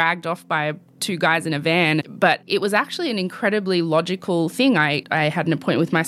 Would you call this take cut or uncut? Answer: cut